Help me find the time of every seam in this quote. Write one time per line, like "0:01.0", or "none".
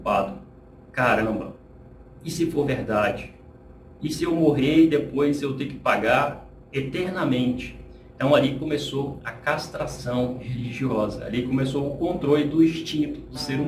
none